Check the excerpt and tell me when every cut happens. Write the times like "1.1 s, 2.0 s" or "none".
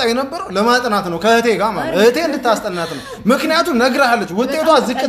none